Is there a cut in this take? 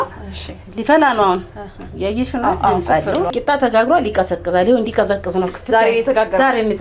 yes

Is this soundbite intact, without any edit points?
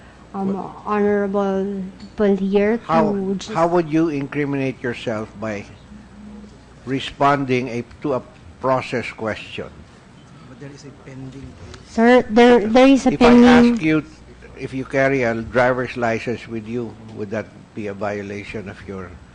yes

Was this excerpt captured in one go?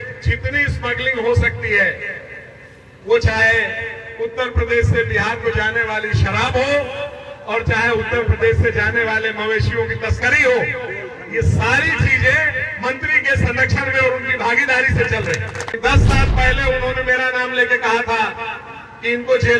no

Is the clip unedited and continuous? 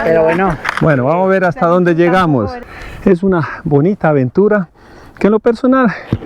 no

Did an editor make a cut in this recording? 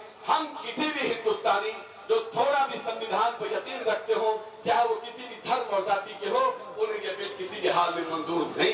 no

